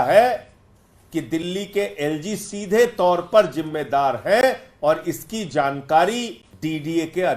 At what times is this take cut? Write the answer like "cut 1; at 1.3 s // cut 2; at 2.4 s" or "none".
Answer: cut 1; at 6.4 s